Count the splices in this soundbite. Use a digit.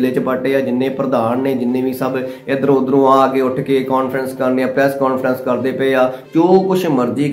1